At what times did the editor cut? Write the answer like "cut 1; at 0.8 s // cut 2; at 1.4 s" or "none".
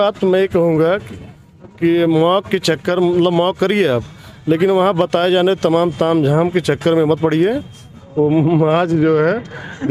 none